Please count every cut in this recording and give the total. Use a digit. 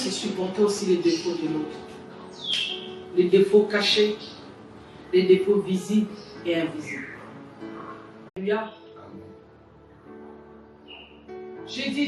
1